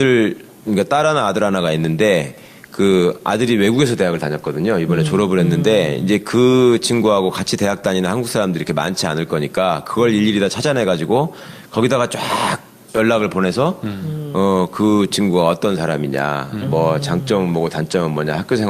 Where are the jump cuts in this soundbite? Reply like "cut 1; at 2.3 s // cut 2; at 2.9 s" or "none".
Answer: none